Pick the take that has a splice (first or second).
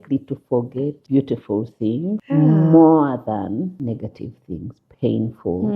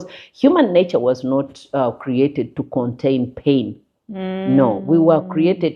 first